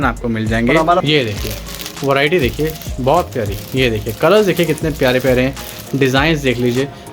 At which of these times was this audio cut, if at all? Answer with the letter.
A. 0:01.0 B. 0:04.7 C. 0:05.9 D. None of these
A